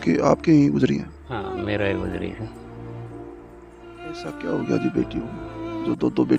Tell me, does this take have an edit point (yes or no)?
yes